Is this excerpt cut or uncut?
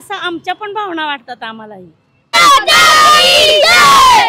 uncut